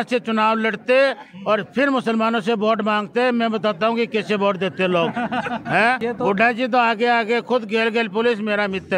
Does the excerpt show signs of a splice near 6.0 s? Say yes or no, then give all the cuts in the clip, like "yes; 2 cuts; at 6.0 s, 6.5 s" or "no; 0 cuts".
yes; 1 cut; at 6.0 s